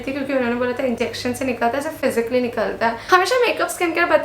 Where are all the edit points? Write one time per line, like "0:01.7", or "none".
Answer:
0:03.1